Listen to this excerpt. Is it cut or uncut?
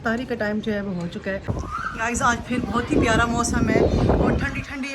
cut